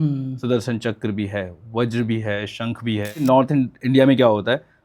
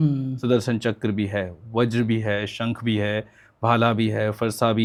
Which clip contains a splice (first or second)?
first